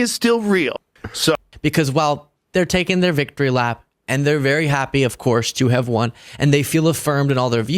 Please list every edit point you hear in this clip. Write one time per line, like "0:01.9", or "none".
0:01.5